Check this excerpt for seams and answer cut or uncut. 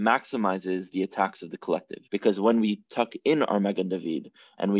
cut